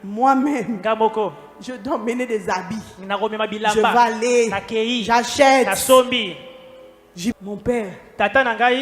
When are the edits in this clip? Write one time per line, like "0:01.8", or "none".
0:07.3